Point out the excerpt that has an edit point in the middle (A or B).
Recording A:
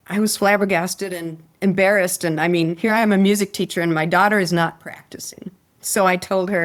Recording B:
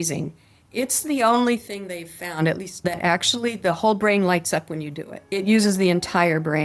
B